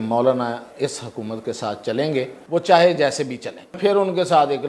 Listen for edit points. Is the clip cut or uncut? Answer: cut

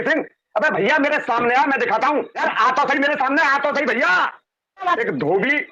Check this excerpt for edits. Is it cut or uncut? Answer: cut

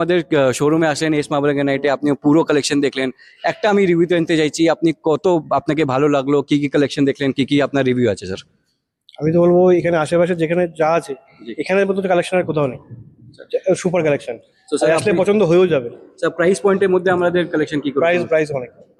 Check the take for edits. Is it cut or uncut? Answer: uncut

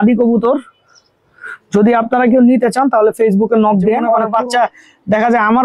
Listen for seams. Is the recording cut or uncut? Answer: cut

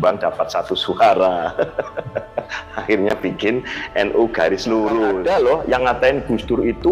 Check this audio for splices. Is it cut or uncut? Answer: cut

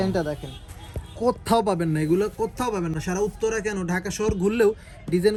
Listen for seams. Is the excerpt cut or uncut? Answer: uncut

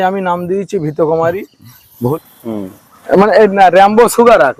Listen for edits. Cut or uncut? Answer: cut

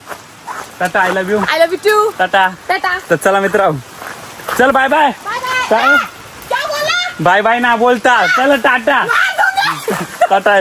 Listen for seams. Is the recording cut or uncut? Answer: uncut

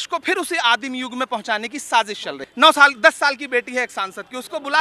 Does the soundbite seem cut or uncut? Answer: cut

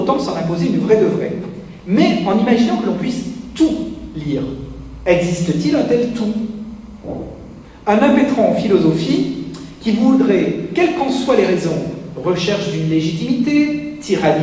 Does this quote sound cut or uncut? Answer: uncut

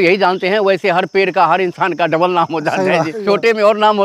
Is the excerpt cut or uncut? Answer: cut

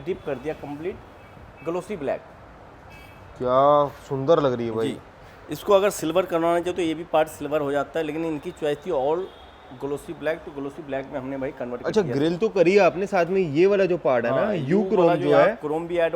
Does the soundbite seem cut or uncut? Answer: uncut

